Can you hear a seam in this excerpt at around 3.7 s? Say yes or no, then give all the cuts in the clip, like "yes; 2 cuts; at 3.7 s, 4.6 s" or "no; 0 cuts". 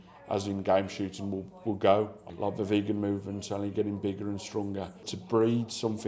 no; 2 cuts; at 2.2 s, 5.1 s